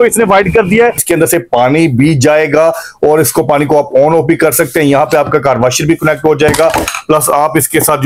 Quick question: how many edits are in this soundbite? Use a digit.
1